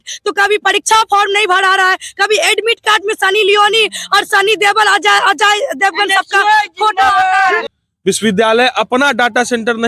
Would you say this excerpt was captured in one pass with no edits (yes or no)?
no